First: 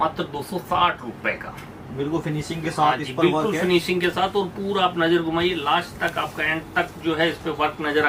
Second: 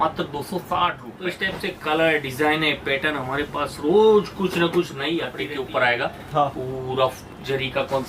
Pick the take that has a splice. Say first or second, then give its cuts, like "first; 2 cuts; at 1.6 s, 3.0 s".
second; 2 cuts; at 1.5 s, 5.3 s